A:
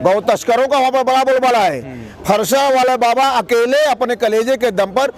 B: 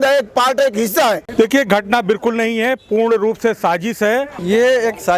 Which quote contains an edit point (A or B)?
B